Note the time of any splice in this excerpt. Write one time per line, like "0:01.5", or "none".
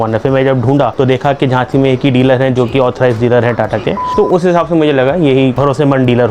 0:00.9
0:04.0
0:05.6